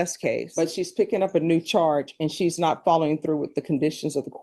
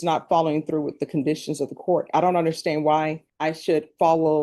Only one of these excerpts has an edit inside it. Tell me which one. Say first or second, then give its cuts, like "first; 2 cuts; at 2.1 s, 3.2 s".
second; 1 cut; at 3.2 s